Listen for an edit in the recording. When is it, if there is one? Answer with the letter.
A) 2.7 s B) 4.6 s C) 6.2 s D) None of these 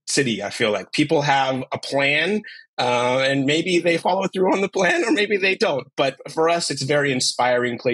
C